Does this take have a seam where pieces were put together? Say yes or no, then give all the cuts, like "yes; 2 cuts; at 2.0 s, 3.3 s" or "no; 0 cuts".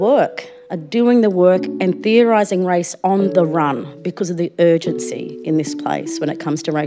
no; 0 cuts